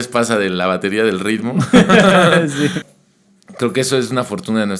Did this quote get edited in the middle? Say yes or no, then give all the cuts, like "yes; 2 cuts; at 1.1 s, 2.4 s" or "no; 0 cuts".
yes; 1 cut; at 2.9 s